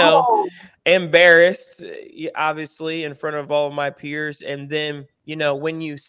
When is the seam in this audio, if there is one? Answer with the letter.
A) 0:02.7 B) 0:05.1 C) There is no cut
B